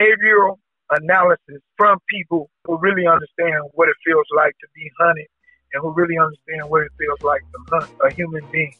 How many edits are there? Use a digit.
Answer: 3